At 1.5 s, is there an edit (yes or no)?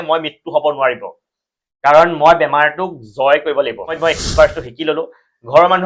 no